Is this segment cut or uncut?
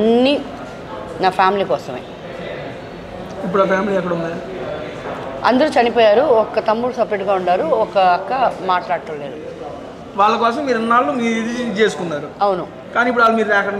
uncut